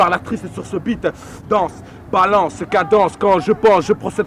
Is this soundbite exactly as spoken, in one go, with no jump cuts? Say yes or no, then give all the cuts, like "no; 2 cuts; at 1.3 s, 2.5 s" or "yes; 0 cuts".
yes; 0 cuts